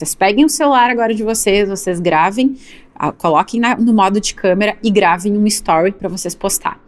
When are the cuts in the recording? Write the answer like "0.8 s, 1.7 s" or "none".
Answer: none